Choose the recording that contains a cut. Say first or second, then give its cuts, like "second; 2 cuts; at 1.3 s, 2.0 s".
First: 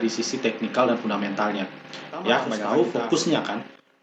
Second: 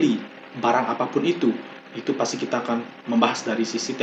first; 1 cut; at 2.6 s